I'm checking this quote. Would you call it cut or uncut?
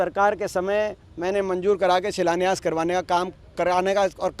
uncut